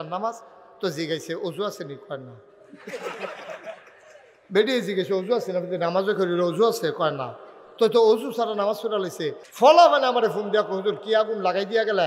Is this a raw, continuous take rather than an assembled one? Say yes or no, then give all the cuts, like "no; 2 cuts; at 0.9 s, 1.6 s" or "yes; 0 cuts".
no; 1 cut; at 9.4 s